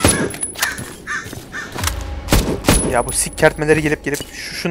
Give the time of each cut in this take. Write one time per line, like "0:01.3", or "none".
none